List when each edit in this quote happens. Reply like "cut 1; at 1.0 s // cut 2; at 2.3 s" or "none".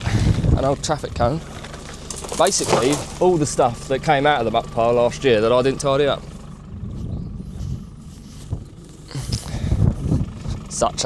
none